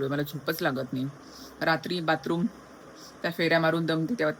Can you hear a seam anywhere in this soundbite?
no; 0 cuts

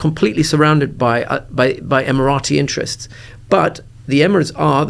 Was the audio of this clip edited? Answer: no; 0 cuts

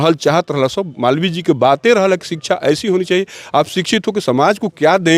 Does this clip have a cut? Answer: no; 0 cuts

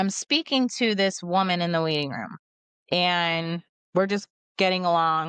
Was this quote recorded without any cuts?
yes; 0 cuts

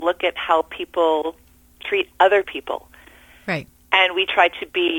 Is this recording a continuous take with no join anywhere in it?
yes; 0 cuts

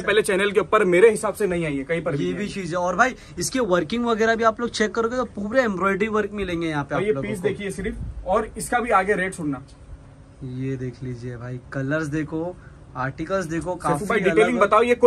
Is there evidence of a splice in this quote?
no; 0 cuts

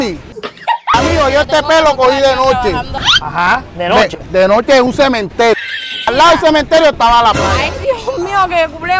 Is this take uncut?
no; 2 cuts; at 0.9 s, 6.1 s

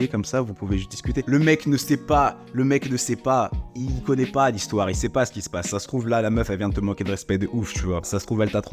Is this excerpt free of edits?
yes; 0 cuts

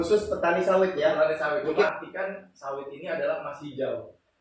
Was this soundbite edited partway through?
yes; 1 cut; at 1.9 s

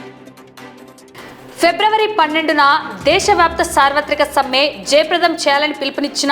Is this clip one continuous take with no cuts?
no; 1 cut; at 1.0 s

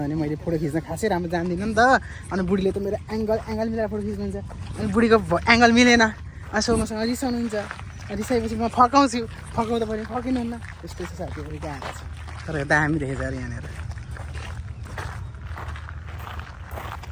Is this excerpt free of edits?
yes; 0 cuts

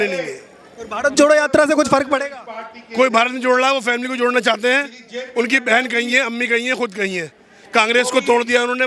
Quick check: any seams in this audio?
no; 0 cuts

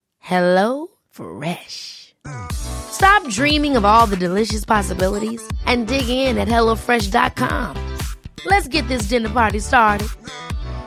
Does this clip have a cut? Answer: no; 0 cuts

